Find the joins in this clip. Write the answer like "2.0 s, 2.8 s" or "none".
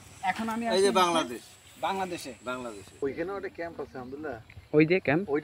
3.0 s